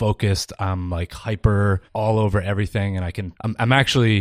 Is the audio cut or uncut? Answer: cut